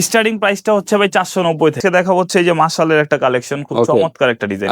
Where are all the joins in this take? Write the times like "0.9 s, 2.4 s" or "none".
1.8 s